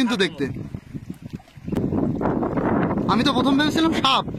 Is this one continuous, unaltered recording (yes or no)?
no